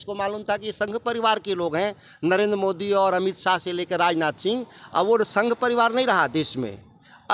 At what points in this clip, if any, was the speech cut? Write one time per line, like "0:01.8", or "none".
none